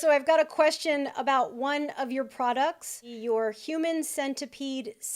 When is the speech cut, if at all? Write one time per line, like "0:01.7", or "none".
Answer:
0:03.0